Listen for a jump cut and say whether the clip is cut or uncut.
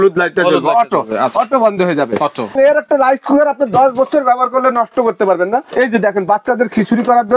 cut